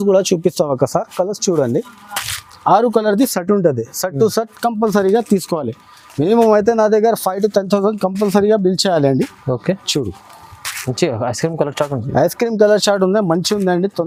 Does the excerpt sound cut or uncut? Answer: uncut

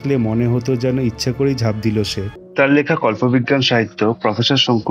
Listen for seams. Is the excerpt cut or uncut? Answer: cut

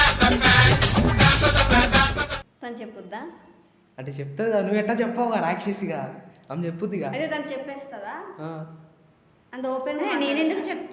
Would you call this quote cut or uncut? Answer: cut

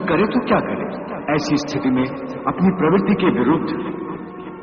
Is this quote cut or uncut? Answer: cut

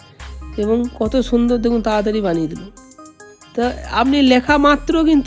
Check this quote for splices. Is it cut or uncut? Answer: uncut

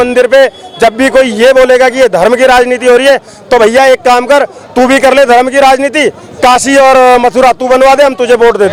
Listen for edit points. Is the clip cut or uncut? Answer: uncut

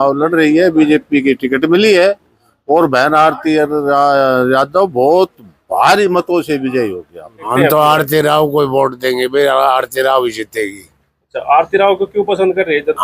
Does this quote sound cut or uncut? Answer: cut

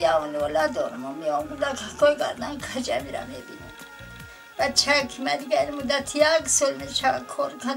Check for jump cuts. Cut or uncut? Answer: uncut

